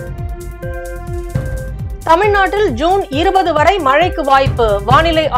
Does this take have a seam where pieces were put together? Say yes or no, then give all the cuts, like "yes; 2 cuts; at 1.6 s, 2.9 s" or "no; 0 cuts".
yes; 2 cuts; at 0.9 s, 1.7 s